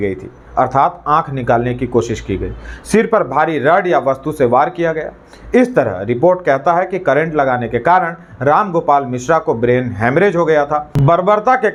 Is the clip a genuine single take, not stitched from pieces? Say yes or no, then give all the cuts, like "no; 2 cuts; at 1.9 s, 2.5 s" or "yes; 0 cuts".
yes; 0 cuts